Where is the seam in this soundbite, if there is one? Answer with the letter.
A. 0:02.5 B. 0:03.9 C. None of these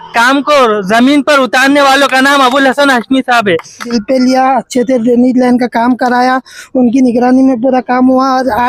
B